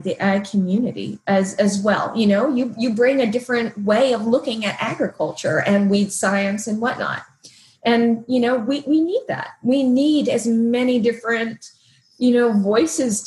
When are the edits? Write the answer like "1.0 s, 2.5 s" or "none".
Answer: none